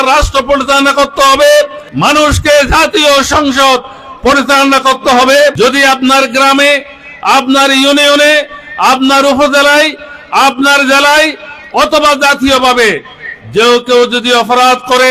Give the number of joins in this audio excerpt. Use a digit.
2